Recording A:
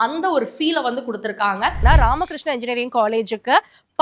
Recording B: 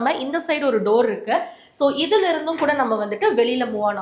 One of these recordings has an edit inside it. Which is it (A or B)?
A